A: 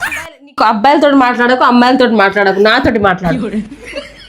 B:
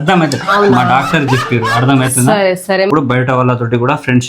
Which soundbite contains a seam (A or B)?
B